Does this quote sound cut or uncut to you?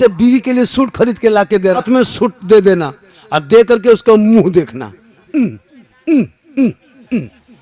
cut